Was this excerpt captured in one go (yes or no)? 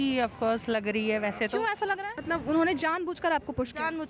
no